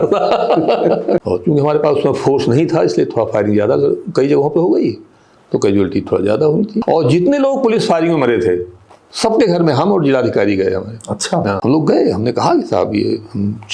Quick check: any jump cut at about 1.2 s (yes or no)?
yes